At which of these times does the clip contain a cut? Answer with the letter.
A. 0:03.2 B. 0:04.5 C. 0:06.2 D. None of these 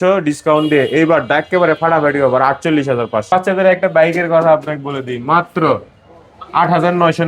A